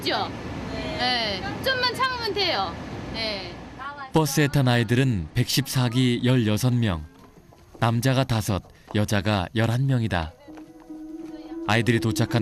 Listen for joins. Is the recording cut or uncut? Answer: cut